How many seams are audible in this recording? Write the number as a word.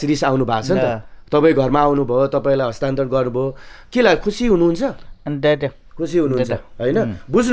zero